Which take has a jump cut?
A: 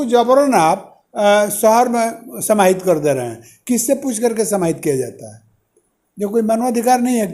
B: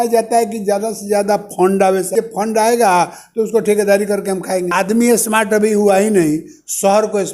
B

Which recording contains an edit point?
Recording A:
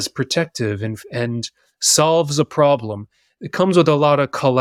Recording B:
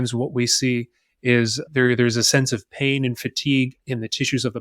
B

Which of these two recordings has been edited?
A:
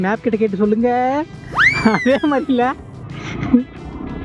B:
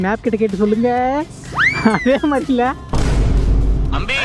B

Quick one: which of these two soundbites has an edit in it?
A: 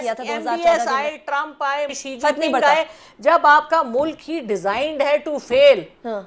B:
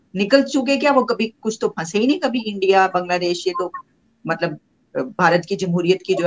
A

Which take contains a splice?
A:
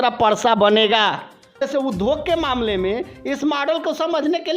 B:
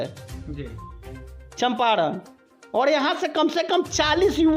A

